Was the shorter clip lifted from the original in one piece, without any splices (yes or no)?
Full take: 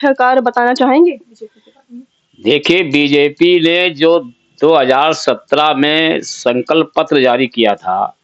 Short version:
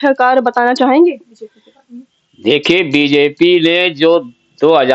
yes